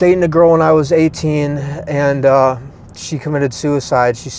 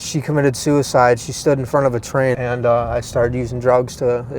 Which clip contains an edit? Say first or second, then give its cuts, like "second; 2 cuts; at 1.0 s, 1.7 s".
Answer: second; 1 cut; at 2.4 s